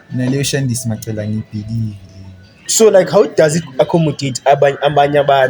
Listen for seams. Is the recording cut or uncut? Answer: cut